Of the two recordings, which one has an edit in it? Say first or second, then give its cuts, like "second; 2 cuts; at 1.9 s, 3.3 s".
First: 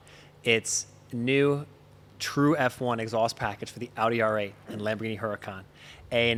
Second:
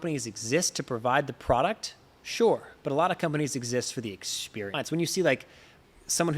second; 1 cut; at 4.7 s